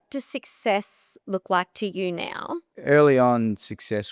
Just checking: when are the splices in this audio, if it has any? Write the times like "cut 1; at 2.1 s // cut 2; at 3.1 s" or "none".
cut 1; at 2.6 s